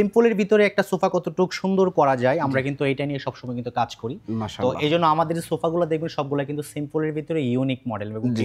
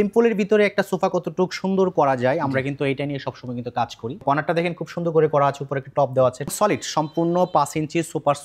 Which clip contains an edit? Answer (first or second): second